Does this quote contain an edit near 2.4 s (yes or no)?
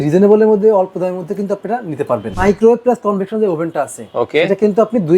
yes